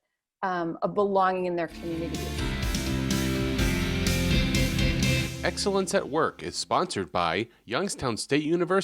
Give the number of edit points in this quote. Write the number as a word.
one